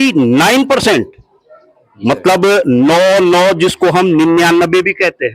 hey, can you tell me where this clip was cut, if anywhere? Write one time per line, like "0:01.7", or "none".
none